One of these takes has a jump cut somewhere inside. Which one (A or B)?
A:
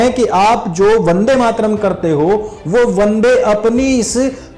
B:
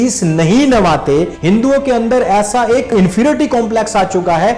B